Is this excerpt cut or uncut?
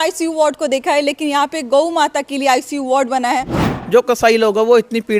cut